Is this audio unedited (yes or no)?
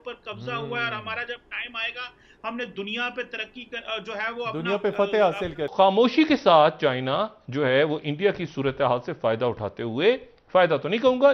no